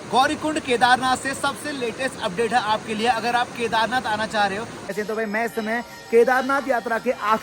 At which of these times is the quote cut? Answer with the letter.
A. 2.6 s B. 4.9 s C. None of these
B